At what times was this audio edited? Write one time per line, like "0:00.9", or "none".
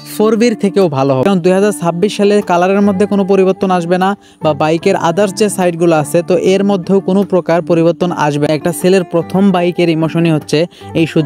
0:01.2
0:08.5

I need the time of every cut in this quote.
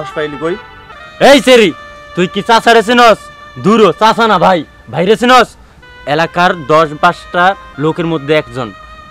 0:01.0

